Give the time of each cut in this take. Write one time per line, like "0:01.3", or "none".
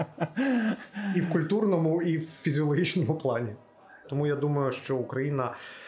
0:04.0